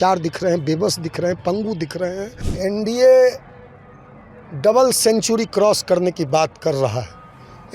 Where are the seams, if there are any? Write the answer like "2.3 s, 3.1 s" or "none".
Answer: 2.4 s